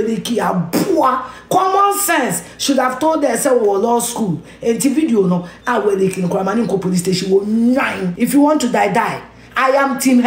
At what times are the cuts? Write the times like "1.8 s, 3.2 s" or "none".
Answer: 8.0 s